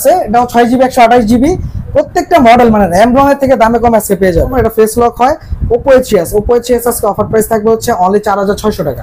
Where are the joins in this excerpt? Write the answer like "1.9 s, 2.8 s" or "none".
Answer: 4.5 s

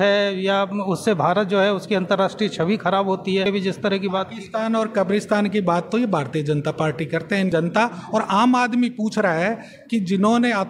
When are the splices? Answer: 3.5 s, 7.5 s

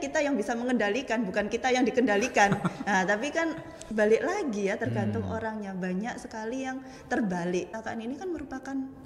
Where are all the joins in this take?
7.7 s

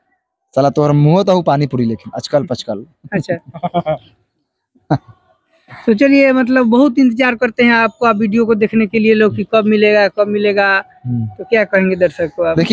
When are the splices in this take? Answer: none

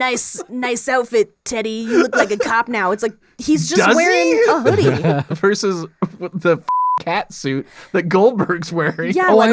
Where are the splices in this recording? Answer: 5.3 s

